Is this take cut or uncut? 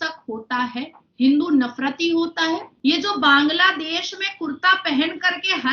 cut